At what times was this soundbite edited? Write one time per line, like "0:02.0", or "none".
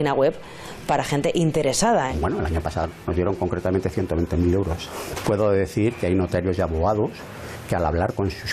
0:02.1
0:04.9